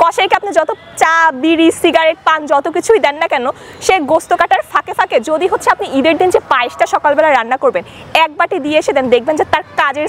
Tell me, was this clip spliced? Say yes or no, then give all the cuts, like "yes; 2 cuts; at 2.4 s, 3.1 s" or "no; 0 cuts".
no; 0 cuts